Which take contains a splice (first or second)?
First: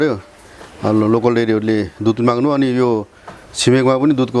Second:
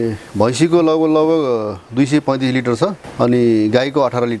second